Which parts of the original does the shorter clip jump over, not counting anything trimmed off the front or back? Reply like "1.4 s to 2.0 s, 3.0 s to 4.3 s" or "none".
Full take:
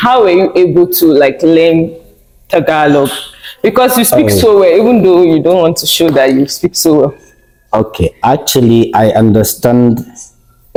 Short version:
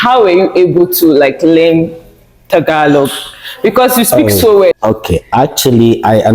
4.7 s to 7.6 s